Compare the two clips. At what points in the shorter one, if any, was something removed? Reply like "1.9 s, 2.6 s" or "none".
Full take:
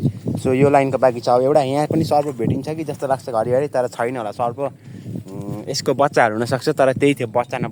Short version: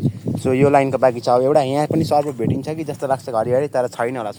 none